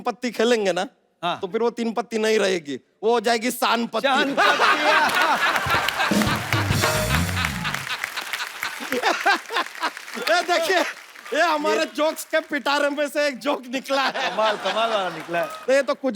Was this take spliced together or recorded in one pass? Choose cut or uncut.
uncut